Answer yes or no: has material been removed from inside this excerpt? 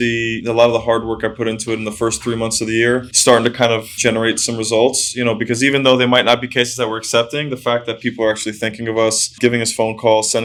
no